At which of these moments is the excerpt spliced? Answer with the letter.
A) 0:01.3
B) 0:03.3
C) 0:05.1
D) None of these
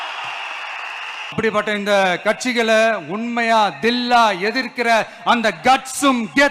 A